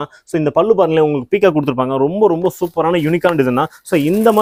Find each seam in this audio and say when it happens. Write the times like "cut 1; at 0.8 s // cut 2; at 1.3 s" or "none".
none